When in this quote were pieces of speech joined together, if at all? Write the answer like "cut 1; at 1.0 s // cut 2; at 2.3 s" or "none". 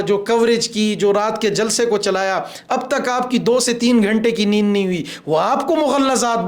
none